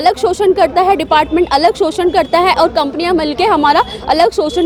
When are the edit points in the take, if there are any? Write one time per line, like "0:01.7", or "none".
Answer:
none

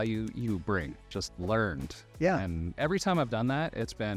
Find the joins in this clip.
0:01.1

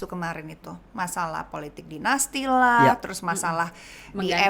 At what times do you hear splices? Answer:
none

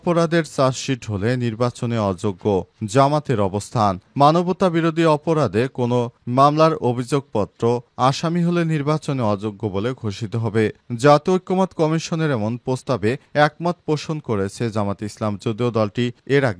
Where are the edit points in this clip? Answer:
none

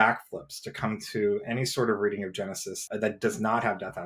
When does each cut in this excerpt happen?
0:02.8

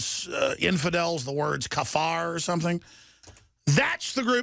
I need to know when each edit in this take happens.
0:02.5

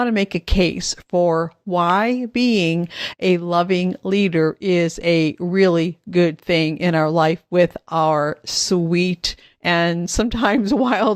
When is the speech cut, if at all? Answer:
none

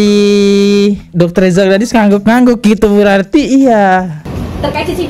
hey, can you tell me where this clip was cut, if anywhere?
0:04.2

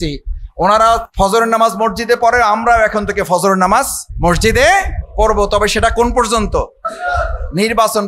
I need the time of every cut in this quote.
0:01.1
0:04.0
0:05.0
0:06.9

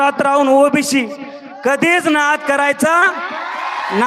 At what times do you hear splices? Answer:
none

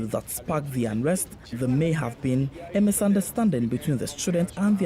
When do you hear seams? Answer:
none

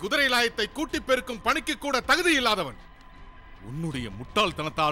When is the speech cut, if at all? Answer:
none

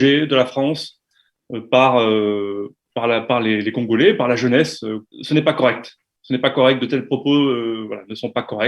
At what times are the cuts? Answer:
0:05.1

